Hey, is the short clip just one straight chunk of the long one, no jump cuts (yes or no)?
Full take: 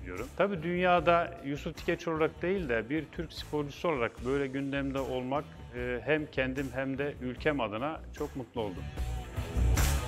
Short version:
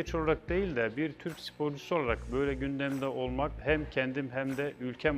no